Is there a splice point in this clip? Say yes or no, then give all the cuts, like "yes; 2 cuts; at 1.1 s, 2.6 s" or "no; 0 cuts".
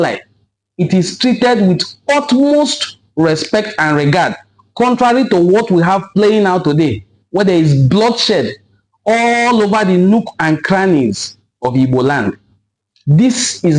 no; 0 cuts